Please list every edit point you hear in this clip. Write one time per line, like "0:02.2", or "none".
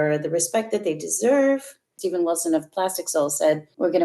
0:01.9